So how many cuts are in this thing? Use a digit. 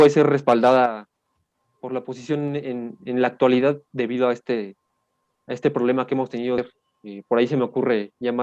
1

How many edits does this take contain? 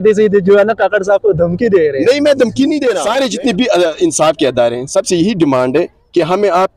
1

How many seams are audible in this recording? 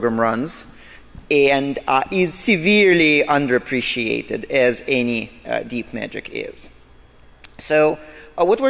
0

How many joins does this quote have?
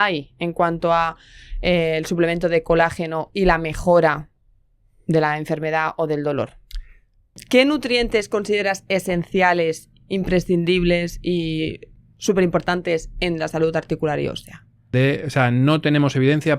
2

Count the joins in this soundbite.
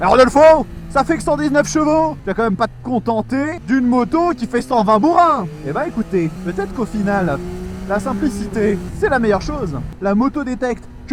4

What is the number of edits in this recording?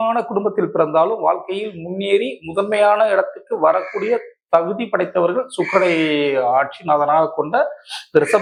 0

